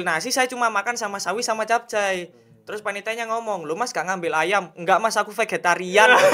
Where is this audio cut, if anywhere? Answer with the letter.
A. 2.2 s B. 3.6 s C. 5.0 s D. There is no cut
D